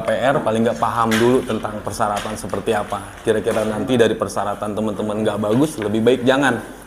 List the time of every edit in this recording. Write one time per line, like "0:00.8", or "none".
none